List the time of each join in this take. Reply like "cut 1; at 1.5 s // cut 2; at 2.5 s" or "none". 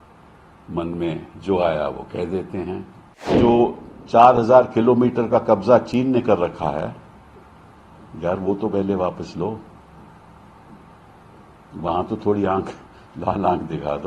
cut 1; at 3.4 s